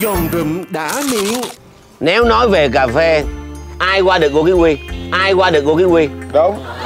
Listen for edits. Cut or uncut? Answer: cut